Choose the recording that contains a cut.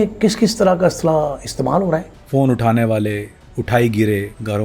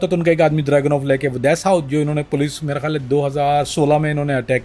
first; 1 cut; at 2.1 s

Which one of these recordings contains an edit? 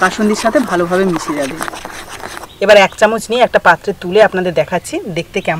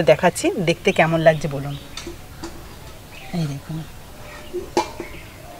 first; 1 cut; at 2.5 s

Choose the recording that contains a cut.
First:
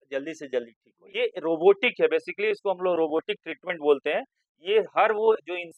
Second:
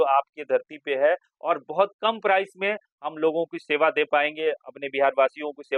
first; 1 cut; at 1.0 s

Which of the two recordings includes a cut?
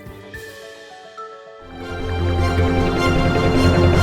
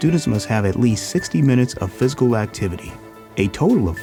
first; 1 cut; at 1.8 s

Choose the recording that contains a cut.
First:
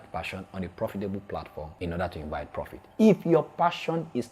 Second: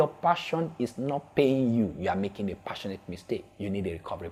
first; 1 cut; at 1.6 s

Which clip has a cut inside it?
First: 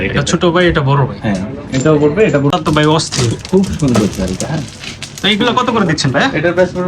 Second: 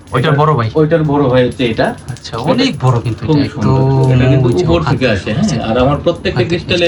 first; 1 cut; at 2.5 s

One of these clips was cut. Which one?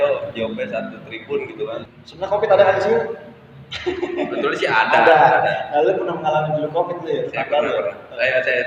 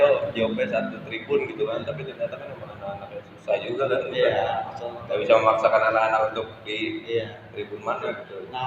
first; 1 cut; at 1.9 s

